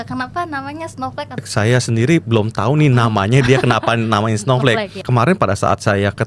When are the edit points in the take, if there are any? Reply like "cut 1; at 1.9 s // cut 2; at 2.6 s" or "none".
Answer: cut 1; at 1.5 s // cut 2; at 5.0 s